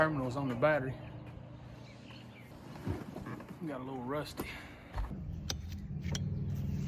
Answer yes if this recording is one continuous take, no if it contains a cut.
no